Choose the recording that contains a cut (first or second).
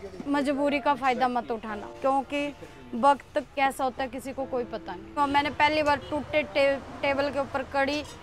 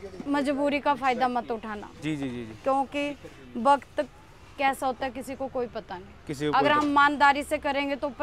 first